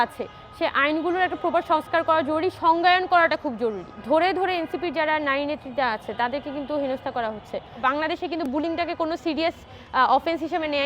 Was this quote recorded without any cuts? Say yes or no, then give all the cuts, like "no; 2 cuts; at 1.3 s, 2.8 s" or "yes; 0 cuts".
no; 2 cuts; at 4.0 s, 7.8 s